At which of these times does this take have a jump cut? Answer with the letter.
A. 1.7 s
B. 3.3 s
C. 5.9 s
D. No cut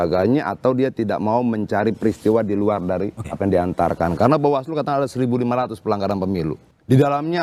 D